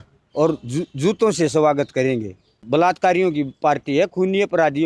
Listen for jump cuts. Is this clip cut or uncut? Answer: cut